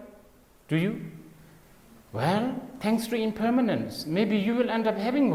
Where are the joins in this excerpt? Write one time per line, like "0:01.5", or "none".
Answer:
none